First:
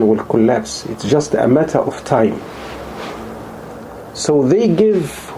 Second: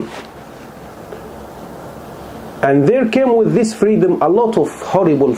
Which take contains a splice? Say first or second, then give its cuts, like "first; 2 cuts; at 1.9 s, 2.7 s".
first; 1 cut; at 3.9 s